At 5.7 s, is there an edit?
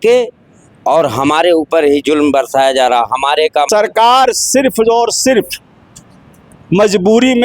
no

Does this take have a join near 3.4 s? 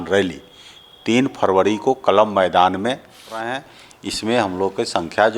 yes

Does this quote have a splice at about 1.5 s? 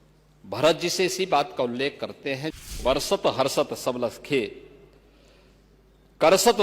no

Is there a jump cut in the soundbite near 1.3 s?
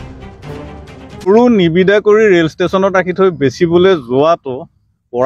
yes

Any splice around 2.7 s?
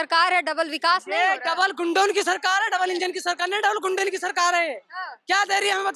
no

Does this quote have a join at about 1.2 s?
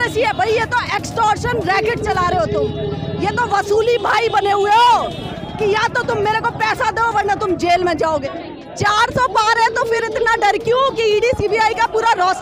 no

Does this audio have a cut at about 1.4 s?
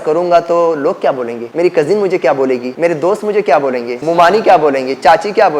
yes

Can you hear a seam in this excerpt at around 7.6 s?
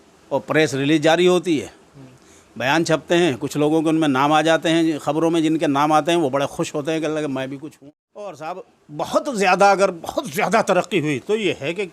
yes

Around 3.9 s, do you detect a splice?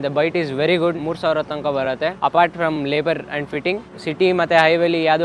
yes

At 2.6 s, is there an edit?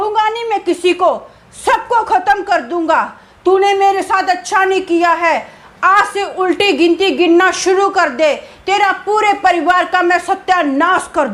no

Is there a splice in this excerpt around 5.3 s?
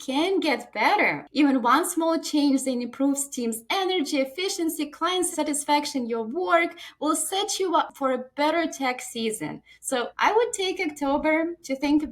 yes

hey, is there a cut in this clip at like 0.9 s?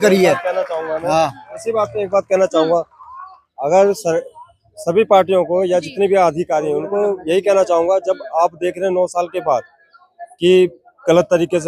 no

